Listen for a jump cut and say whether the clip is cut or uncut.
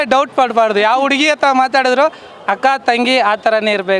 uncut